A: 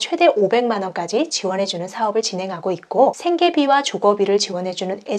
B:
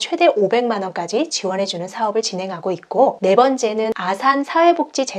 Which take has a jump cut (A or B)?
A